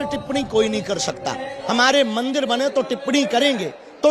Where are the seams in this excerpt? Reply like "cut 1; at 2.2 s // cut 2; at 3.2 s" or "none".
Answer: none

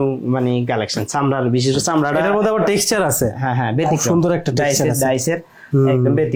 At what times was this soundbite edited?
none

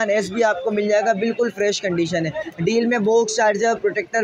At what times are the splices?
none

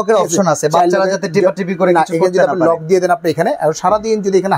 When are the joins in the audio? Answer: none

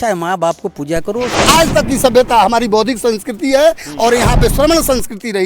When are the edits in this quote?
cut 1; at 1.3 s

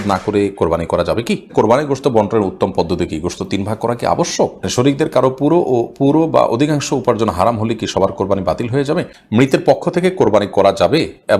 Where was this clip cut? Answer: cut 1; at 1.5 s // cut 2; at 4.6 s // cut 3; at 9.2 s

